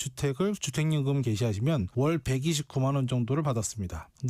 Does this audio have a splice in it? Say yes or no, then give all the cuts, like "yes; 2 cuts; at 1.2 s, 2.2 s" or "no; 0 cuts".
no; 0 cuts